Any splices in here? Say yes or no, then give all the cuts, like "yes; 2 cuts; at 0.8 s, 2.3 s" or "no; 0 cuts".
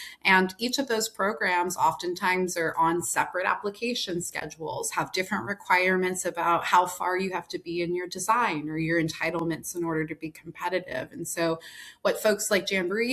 no; 0 cuts